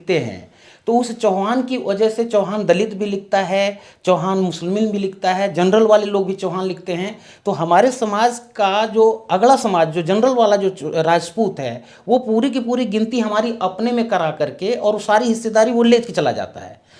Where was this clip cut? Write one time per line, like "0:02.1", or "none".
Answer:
none